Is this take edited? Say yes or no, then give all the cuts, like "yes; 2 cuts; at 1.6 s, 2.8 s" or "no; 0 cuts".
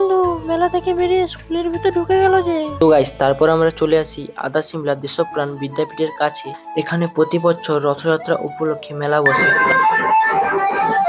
yes; 2 cuts; at 2.8 s, 9.3 s